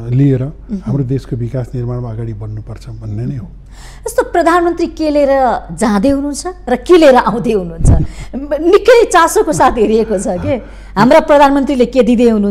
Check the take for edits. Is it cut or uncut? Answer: uncut